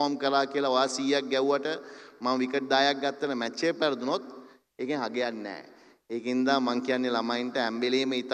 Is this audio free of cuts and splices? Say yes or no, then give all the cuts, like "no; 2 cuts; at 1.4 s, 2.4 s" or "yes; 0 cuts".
yes; 0 cuts